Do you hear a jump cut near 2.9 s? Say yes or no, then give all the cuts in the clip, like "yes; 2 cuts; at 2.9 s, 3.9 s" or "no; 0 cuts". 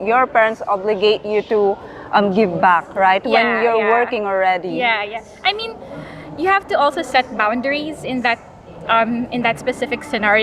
no; 0 cuts